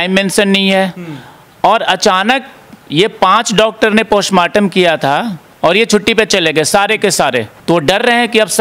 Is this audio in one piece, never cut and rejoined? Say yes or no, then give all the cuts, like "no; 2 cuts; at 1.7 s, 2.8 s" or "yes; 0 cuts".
no; 1 cut; at 7.5 s